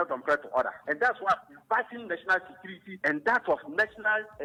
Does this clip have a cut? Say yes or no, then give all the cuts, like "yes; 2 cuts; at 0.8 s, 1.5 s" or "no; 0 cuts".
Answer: no; 0 cuts